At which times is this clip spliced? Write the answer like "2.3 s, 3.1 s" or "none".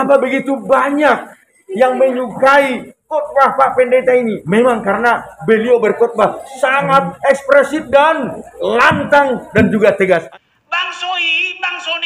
10.3 s